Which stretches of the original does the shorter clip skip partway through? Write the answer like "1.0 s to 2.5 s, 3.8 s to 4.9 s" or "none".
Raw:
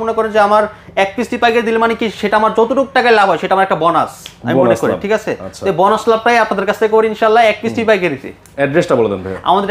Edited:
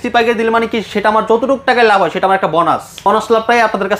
4.3 s to 5.8 s